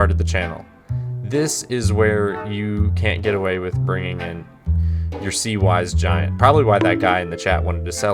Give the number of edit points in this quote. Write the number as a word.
zero